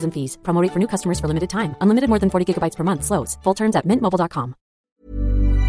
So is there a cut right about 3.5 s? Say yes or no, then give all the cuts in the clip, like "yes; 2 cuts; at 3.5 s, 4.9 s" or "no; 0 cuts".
no; 1 cut; at 4.8 s